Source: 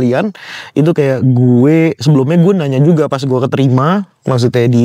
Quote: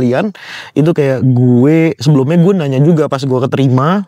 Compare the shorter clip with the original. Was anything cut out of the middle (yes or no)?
no